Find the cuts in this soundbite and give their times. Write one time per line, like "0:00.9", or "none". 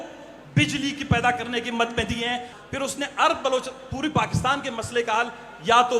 0:02.6